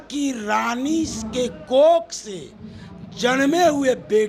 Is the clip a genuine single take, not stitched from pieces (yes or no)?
yes